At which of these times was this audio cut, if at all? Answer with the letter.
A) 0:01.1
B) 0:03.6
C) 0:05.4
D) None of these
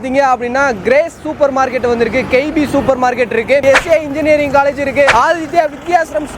B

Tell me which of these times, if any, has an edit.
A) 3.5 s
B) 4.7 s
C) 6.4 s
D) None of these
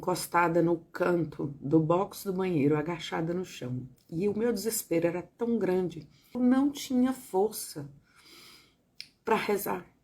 C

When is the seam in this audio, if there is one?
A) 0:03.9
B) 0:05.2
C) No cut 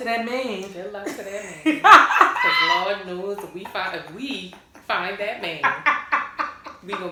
C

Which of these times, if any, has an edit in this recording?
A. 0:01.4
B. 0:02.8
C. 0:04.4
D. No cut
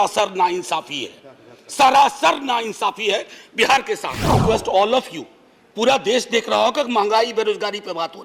C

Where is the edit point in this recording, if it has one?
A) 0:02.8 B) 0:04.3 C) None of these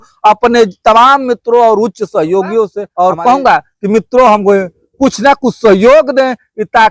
A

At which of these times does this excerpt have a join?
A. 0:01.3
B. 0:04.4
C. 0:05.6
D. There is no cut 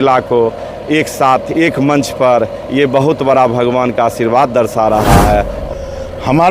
C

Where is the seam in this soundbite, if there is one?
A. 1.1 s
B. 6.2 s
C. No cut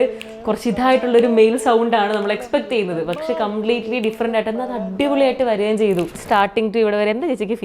B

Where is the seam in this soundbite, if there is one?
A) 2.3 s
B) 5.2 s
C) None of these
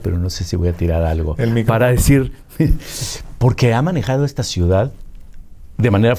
C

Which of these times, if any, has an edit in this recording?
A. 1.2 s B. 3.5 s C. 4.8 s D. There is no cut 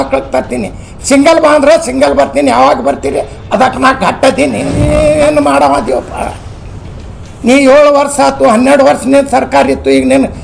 C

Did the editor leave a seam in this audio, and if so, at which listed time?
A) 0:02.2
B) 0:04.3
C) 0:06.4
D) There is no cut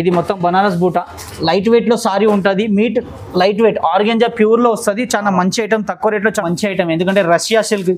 C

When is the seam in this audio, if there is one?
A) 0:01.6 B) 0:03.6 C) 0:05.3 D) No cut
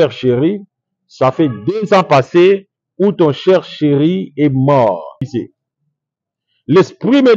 C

